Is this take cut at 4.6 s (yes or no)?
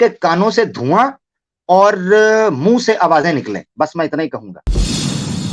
yes